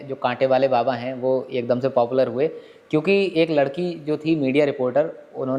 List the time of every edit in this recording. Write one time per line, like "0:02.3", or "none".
none